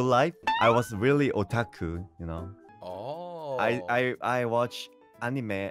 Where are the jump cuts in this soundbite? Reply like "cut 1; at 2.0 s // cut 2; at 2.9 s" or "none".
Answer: none